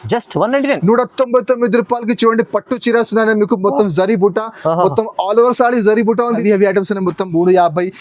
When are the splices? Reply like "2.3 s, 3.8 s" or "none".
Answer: 6.4 s